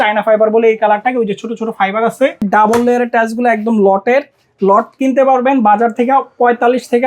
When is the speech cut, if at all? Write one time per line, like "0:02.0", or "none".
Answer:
0:02.4